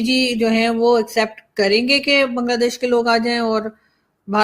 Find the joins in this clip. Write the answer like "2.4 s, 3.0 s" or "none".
none